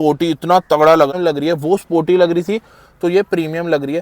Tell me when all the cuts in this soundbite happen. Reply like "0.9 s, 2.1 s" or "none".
1.1 s